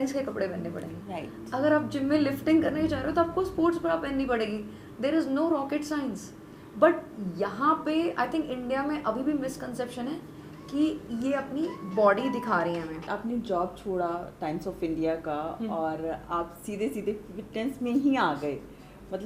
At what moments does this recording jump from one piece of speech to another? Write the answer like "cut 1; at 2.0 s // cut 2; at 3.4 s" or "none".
cut 1; at 13.1 s